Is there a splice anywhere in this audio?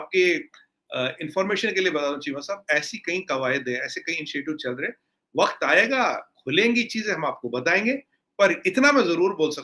no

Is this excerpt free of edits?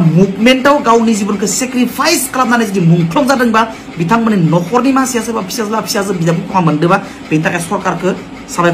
yes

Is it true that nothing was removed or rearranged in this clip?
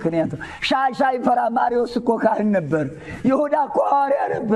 yes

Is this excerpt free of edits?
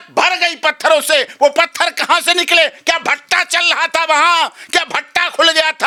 yes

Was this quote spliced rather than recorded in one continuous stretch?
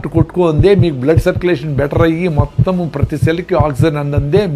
no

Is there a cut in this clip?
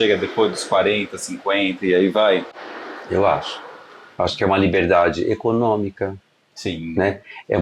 no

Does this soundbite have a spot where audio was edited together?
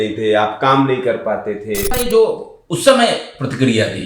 yes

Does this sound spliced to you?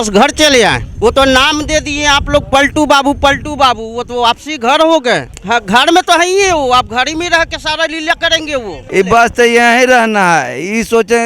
yes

